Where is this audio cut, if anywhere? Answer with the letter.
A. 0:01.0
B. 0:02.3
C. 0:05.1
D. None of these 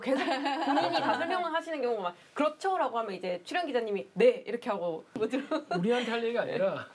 C